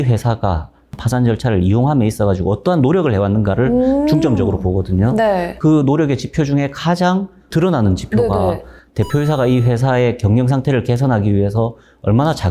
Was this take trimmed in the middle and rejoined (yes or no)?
yes